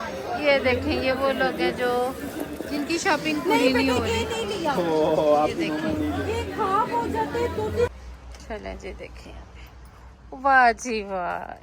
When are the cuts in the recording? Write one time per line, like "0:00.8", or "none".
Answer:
0:07.9

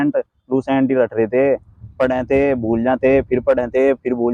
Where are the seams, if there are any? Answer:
none

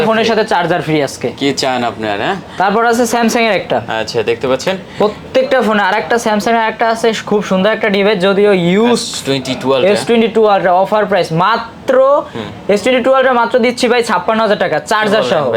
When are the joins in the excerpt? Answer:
none

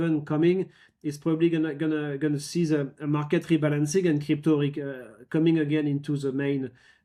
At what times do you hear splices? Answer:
none

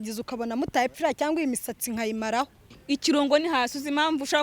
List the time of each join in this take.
0:02.7

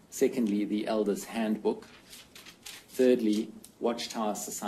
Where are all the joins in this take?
0:00.9

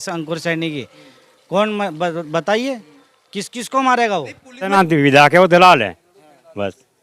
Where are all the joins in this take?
0:04.7

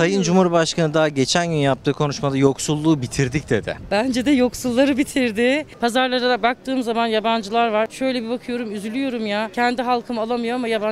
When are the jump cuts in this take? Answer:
0:03.8
0:05.7
0:07.9
0:09.5

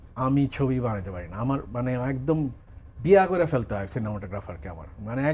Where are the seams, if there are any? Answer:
none

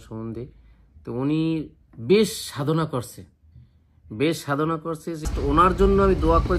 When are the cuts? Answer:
0:05.3

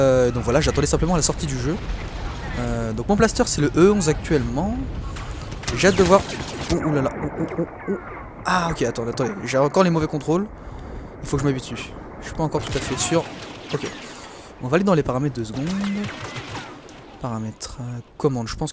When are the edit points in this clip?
0:01.1

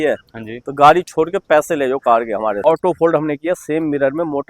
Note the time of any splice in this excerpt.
0:02.6

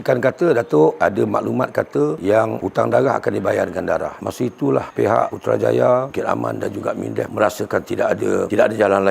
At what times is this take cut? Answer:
0:01.0
0:04.2

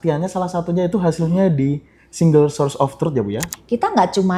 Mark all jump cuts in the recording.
0:03.4

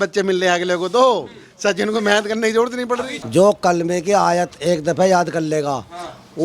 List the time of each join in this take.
0:03.1

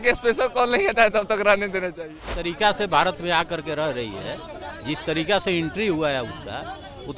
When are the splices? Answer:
0:02.2

